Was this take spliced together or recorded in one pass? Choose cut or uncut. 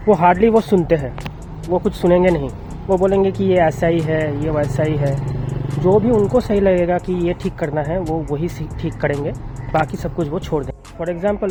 uncut